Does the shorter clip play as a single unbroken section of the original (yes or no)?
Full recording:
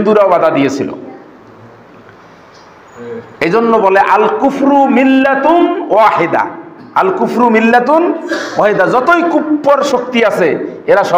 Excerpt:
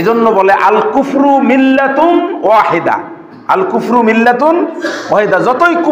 yes